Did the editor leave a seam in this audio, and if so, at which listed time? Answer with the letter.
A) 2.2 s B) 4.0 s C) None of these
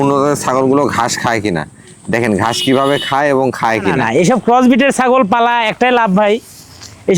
B